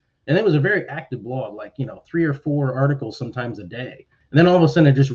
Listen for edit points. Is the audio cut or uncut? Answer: cut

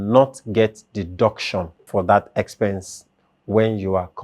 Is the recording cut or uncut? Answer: cut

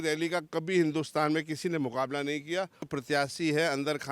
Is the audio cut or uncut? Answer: cut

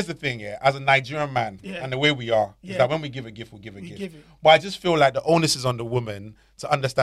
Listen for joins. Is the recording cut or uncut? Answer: uncut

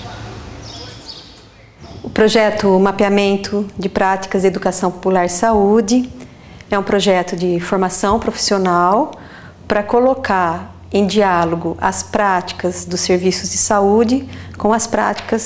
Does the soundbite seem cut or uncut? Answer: cut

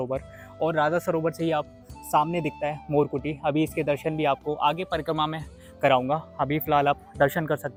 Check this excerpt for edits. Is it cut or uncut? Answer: uncut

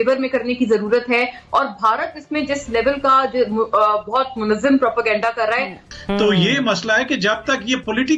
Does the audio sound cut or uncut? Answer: cut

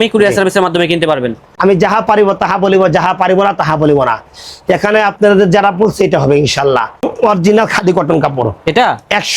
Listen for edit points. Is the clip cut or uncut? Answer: cut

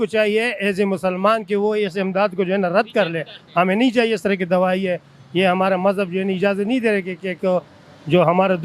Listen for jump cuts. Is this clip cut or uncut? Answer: uncut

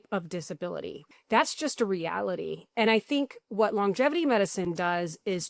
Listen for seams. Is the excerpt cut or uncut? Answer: cut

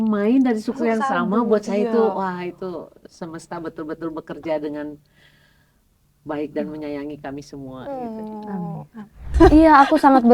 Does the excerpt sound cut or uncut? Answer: cut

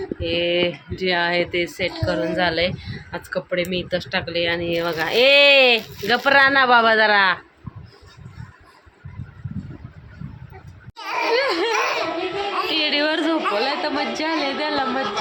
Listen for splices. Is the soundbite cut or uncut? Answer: cut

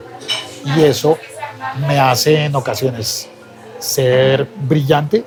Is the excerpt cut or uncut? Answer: uncut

